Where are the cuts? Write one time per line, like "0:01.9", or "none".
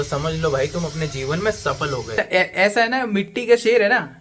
0:02.2